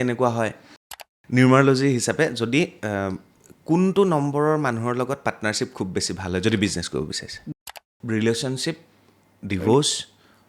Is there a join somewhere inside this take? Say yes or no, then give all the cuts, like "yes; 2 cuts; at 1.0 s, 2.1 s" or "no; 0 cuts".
yes; 2 cuts; at 0.8 s, 7.6 s